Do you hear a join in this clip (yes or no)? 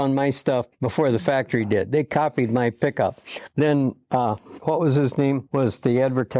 yes